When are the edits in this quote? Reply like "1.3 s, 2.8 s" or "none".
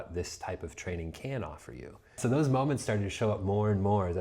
2.2 s